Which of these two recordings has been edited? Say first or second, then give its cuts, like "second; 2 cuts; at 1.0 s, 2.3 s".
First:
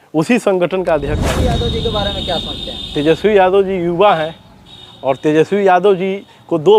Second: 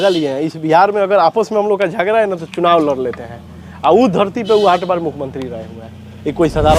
first; 1 cut; at 1.4 s